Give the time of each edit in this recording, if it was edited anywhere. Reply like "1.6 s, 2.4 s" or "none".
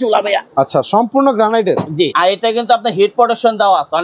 2.1 s